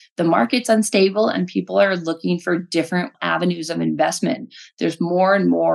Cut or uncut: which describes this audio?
cut